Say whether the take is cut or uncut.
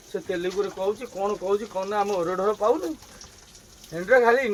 uncut